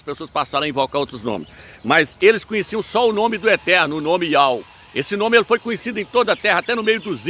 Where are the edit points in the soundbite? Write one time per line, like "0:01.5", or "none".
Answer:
none